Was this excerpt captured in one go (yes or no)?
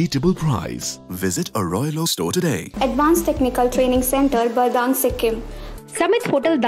no